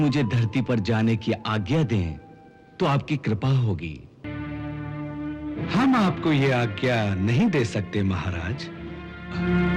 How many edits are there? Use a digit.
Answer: 1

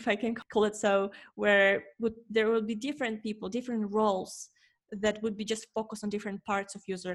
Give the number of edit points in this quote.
0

